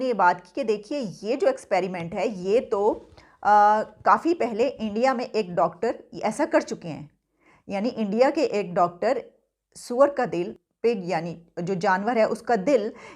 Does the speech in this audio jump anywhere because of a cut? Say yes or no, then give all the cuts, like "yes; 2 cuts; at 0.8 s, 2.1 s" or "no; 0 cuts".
yes; 1 cut; at 10.6 s